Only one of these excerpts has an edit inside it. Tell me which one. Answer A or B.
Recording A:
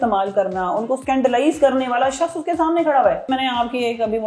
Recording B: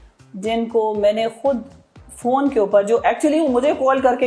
A